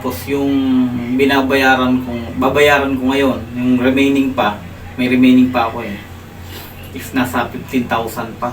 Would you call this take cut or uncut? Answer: uncut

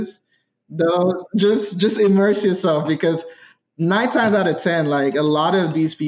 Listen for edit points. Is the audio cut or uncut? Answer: uncut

